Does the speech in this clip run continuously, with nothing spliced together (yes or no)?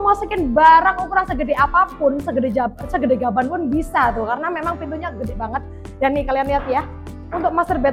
yes